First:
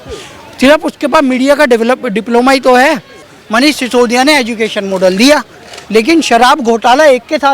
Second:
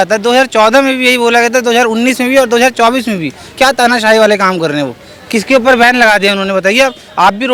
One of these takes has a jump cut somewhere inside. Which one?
first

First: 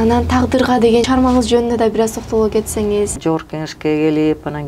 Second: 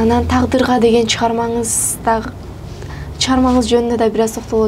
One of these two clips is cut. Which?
first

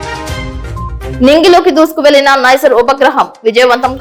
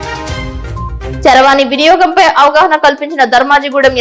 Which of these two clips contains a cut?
second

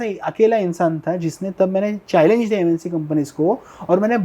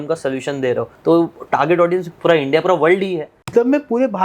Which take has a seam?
second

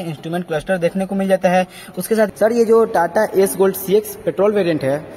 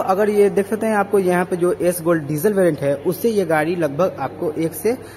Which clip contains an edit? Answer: first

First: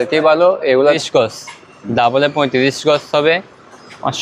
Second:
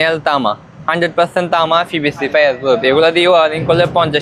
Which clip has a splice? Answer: first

